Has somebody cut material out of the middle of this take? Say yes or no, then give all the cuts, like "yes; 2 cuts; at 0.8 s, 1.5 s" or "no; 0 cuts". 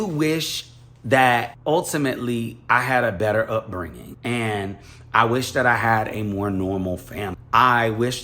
yes; 3 cuts; at 1.5 s, 4.0 s, 7.4 s